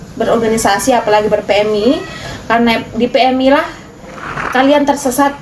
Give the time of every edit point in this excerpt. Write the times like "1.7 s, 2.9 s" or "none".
none